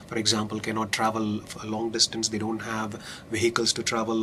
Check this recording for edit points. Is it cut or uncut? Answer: uncut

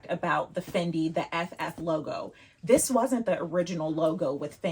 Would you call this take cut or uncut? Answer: uncut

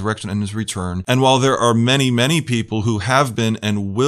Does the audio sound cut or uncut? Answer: cut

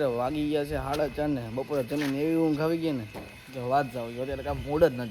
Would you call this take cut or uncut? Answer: uncut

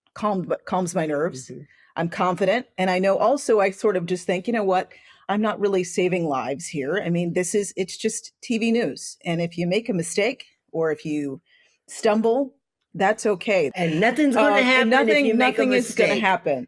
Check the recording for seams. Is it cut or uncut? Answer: cut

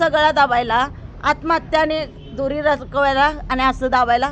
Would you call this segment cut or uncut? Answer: uncut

